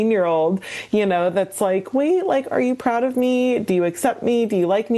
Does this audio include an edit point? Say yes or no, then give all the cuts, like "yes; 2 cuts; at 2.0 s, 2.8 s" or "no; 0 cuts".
no; 0 cuts